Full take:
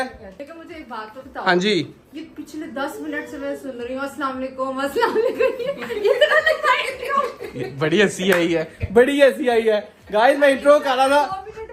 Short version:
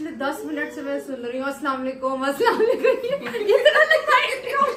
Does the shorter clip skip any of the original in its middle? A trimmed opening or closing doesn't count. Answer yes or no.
no